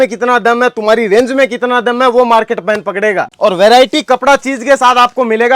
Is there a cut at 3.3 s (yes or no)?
yes